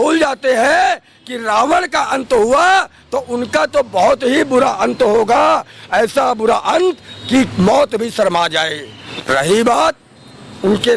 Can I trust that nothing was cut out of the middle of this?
no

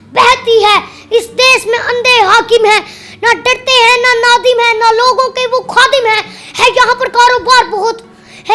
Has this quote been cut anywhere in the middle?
no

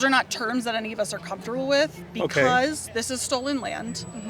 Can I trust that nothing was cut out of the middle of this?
yes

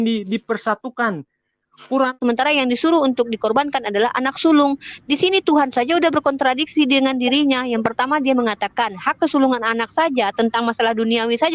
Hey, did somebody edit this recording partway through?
yes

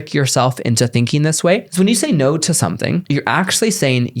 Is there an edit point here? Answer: yes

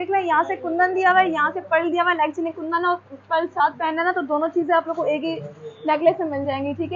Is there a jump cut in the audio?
no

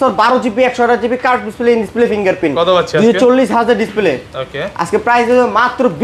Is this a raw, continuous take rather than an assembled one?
yes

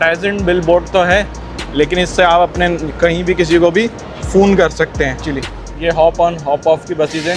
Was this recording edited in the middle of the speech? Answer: yes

